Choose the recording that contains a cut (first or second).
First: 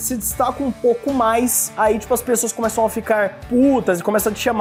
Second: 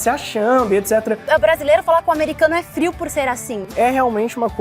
second